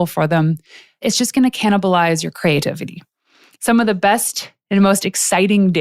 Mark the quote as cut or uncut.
cut